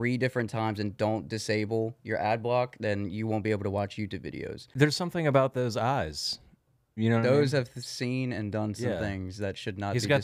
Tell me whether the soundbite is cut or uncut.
cut